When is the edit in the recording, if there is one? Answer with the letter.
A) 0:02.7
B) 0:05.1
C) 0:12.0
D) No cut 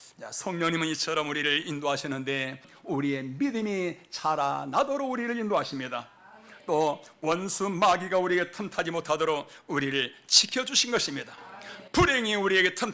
A